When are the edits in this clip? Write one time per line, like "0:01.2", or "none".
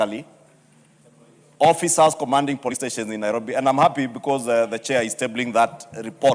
0:02.8